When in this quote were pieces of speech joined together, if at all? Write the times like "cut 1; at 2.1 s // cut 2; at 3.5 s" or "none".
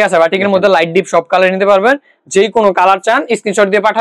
none